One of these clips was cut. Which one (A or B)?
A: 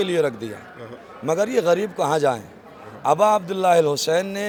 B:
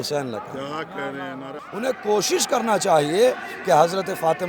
B